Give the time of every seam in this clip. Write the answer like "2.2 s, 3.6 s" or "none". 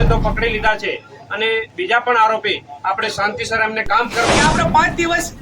4.2 s